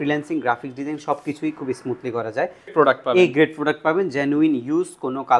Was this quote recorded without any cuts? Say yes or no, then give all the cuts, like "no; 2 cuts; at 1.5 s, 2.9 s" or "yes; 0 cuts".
no; 1 cut; at 2.7 s